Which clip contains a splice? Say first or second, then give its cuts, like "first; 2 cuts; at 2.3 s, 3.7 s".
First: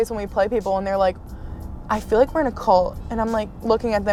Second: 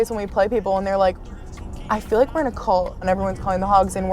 second; 1 cut; at 3.1 s